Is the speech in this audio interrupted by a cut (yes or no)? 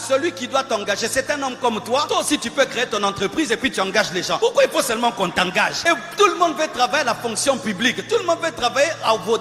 yes